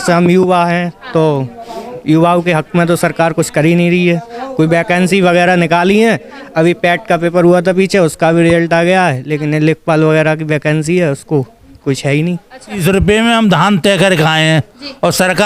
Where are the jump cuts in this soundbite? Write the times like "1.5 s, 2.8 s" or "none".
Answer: 12.8 s